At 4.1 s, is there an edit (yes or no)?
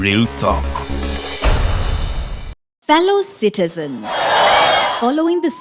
no